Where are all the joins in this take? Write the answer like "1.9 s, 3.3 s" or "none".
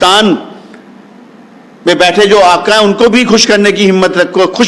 none

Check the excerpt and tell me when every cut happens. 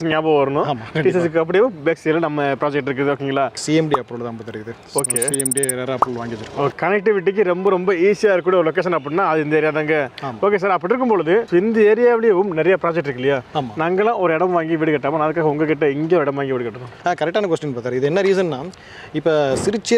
3.6 s, 6.7 s

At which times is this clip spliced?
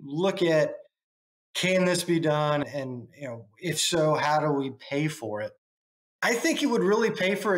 2.6 s

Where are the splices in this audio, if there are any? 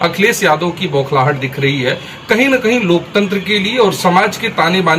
none

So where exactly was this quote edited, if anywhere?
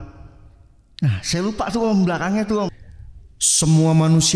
2.7 s

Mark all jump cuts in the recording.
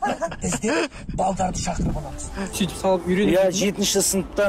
2.5 s

